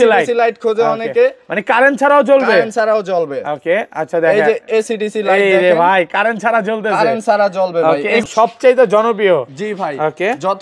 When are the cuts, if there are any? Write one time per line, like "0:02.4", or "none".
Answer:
0:07.8